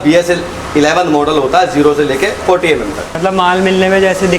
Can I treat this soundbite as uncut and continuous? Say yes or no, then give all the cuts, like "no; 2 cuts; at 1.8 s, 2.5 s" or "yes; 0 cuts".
no; 1 cut; at 3.1 s